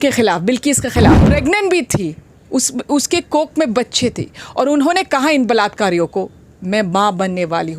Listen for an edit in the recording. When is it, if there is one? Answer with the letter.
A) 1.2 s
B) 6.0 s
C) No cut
A